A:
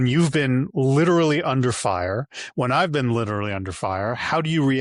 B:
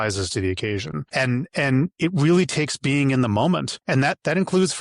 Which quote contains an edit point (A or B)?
B